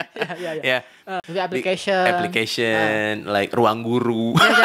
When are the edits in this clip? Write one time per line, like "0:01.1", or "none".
0:01.2